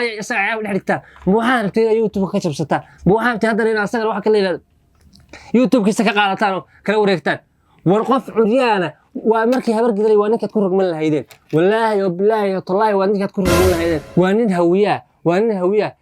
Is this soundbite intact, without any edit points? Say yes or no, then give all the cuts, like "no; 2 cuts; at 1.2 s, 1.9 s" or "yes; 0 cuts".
no; 1 cut; at 14.0 s